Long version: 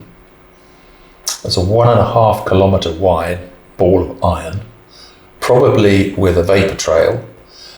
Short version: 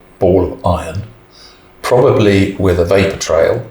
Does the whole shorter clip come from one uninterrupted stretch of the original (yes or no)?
yes